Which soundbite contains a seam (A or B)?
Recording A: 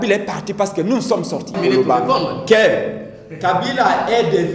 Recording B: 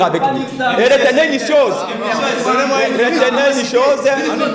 A